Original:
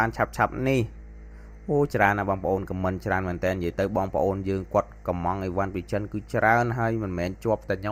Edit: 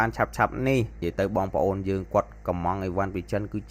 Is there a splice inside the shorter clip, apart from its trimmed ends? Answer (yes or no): yes